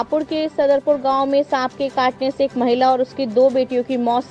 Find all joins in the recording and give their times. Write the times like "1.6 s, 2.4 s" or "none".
none

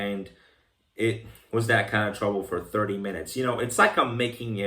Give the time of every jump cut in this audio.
none

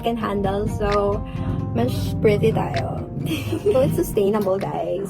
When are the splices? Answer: 3.7 s

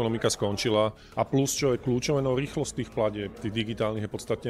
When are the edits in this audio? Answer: 1.0 s

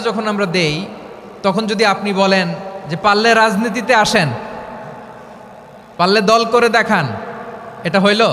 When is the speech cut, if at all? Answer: none

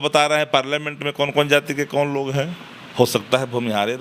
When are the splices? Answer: 2.8 s

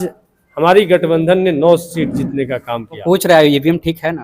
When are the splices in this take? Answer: 3.0 s

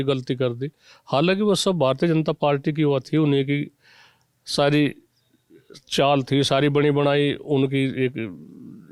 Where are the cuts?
none

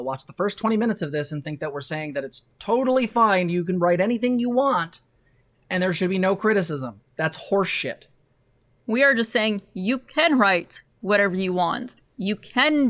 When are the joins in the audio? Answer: none

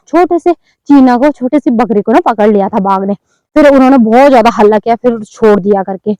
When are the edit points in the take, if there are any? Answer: none

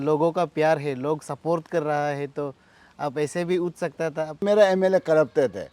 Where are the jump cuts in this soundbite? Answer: 4.4 s

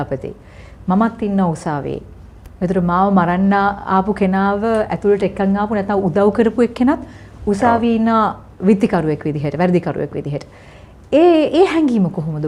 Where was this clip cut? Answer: none

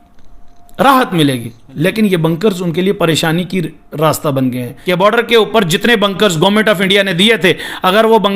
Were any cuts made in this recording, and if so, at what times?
4.7 s

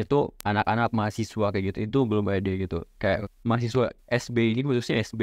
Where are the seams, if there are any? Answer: 3.3 s

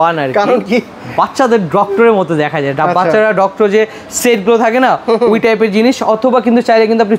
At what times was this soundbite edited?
none

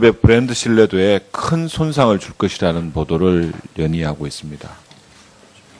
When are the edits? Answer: none

